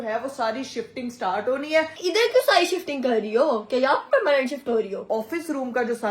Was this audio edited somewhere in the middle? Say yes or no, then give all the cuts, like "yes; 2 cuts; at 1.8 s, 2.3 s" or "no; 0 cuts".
yes; 2 cuts; at 1.9 s, 5.1 s